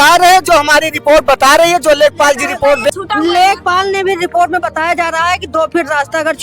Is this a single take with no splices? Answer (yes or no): no